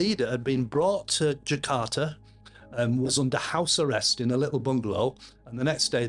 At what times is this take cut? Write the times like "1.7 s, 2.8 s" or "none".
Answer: none